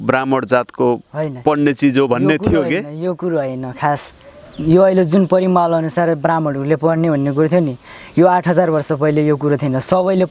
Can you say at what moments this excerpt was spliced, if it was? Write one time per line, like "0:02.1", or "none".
none